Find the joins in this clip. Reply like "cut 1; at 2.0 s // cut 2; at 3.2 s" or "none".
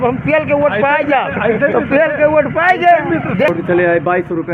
cut 1; at 3.5 s